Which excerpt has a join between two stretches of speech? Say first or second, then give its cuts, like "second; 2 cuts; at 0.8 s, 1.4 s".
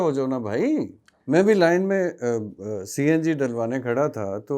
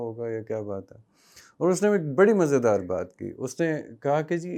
first; 1 cut; at 1.1 s